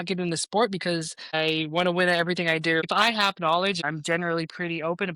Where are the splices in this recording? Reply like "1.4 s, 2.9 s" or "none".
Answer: 1.3 s, 2.8 s, 3.8 s